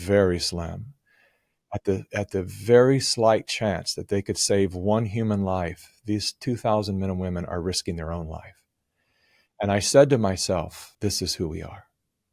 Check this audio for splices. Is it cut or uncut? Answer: cut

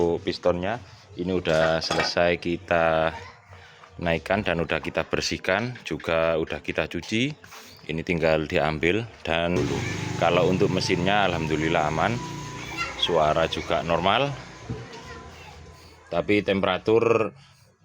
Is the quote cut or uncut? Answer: cut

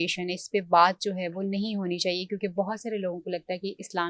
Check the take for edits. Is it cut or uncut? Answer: uncut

